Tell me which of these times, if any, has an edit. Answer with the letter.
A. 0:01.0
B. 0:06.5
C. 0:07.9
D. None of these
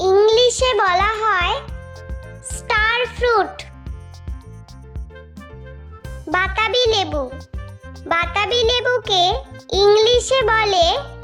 D